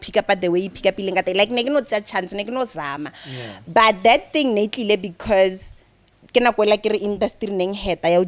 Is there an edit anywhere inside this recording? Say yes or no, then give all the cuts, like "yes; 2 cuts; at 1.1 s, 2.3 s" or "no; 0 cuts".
no; 0 cuts